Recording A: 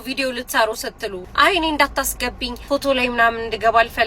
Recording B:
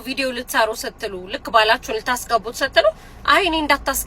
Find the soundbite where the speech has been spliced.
A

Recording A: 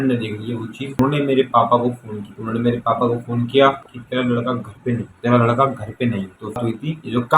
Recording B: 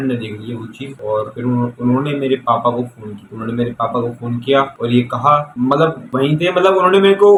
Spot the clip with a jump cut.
A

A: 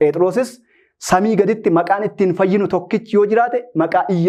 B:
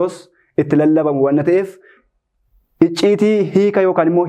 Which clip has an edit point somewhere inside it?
B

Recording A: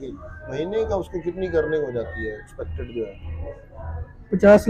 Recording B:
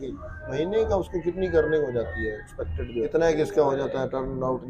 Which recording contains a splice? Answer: B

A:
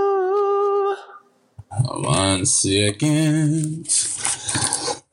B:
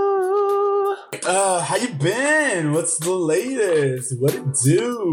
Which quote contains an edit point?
B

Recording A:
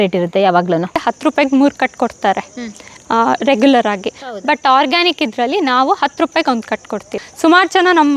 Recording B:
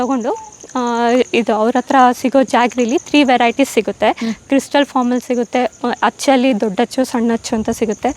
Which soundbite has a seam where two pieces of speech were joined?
A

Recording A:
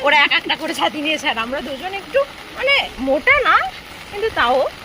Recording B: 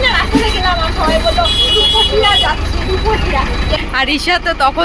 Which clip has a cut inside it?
B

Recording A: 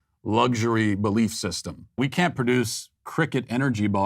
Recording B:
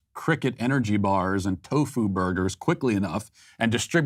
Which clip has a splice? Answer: A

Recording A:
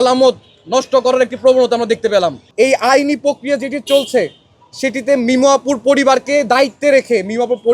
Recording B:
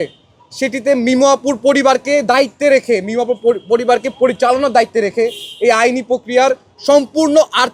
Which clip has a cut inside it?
A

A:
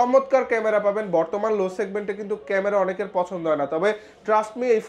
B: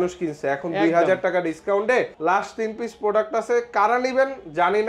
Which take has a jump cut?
B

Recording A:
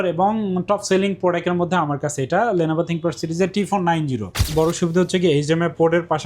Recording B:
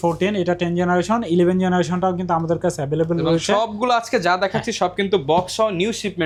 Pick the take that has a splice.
A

